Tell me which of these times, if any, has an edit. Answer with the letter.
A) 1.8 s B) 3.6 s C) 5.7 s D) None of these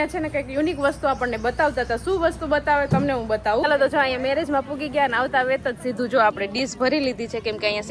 B